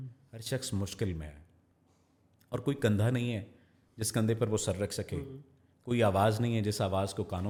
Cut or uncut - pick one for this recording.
uncut